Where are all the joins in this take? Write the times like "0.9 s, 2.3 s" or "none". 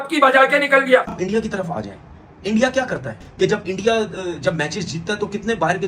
1.1 s, 3.1 s